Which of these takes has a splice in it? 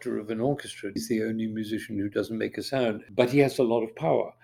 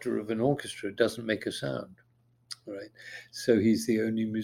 first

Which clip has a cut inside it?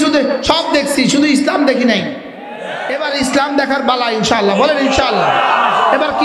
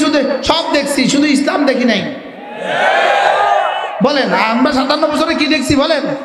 first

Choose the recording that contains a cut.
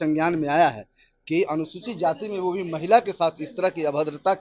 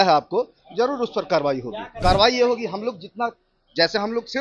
second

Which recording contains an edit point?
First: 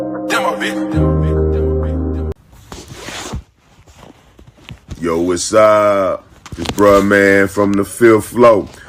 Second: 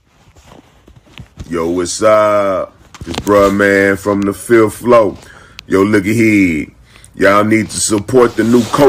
first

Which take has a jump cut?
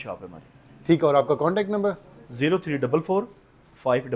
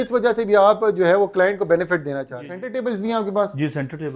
second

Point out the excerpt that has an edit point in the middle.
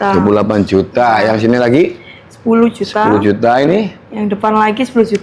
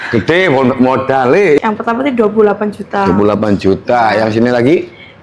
second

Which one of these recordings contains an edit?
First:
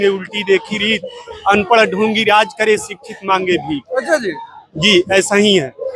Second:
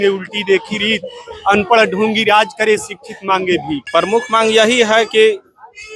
second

